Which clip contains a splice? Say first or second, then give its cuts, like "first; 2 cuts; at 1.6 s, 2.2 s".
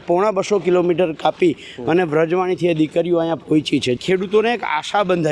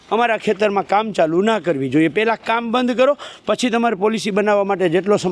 first; 1 cut; at 4.0 s